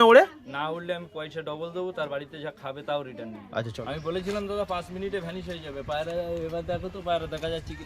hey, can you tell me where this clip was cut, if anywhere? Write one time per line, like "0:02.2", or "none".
0:03.7